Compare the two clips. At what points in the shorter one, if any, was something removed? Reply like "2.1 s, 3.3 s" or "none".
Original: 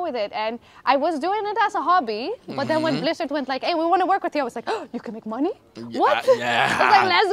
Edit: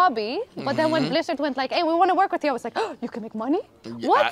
none